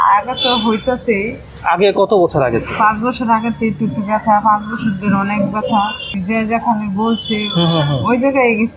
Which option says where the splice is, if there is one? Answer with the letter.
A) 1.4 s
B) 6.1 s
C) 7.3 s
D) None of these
B